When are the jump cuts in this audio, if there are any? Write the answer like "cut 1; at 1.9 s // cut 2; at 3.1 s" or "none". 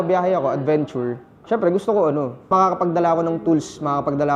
cut 1; at 1.3 s // cut 2; at 2.4 s